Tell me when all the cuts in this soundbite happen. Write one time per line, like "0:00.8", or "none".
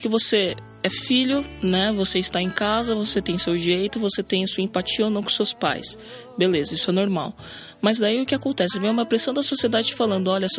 none